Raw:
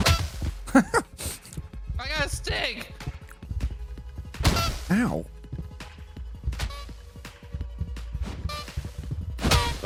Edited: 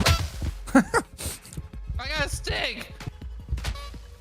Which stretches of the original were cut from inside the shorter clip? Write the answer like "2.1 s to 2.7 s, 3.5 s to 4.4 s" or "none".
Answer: 3.1 s to 6.1 s